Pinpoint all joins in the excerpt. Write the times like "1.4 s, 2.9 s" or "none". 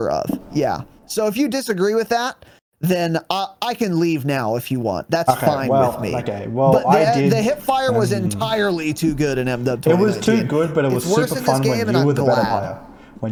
none